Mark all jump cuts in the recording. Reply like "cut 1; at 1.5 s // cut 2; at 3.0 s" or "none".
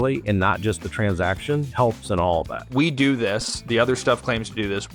cut 1; at 2.6 s